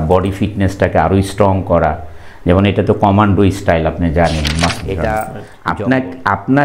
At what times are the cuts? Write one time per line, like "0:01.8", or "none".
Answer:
0:04.9